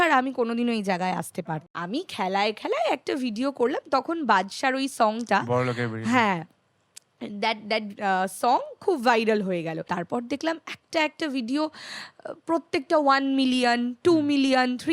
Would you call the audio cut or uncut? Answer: cut